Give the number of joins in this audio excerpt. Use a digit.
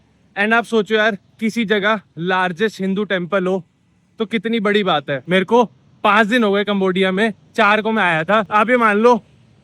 2